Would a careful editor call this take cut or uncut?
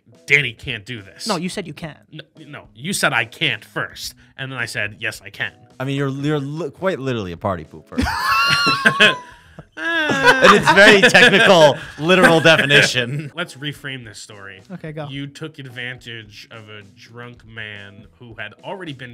cut